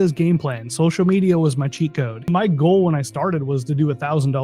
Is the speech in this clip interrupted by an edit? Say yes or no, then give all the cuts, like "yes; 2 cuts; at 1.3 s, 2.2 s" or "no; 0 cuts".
yes; 1 cut; at 2.3 s